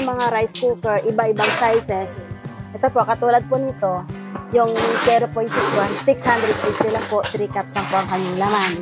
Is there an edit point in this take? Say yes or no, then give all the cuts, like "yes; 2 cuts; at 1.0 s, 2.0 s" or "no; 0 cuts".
no; 0 cuts